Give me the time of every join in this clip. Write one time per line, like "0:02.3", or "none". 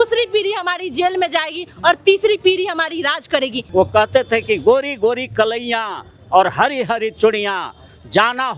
0:03.6